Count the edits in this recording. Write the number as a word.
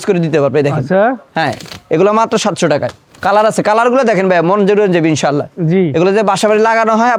zero